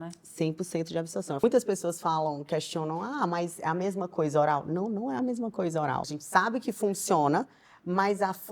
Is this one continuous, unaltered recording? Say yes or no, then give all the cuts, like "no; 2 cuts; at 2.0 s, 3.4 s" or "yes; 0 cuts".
no; 2 cuts; at 1.4 s, 6.2 s